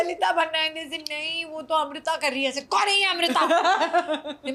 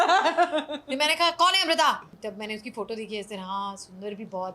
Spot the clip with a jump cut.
second; 1 cut; at 2.1 s

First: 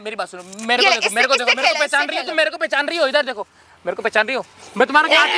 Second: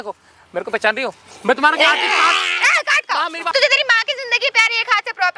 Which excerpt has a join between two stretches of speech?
second; 1 cut; at 3.5 s

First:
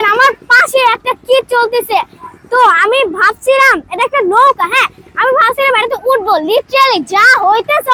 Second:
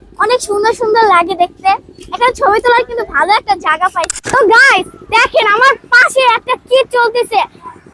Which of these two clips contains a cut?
second; 1 cut; at 4.1 s

